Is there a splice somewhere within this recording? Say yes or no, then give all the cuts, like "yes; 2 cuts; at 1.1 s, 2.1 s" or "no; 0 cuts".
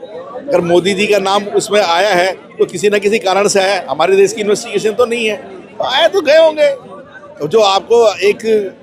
no; 0 cuts